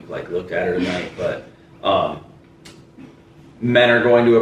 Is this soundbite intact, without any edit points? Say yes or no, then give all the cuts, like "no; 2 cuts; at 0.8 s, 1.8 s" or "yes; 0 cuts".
yes; 0 cuts